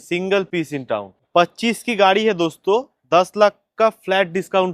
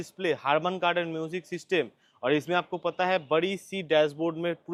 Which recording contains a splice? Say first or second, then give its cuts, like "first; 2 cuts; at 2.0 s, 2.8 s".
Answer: first; 1 cut; at 1.1 s